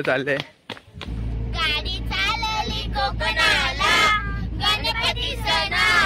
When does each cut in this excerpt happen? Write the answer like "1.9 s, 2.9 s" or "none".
1.2 s